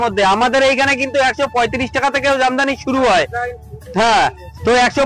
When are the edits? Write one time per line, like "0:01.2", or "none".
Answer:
none